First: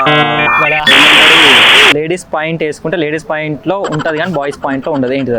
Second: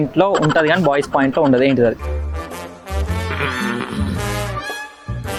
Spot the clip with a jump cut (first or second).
first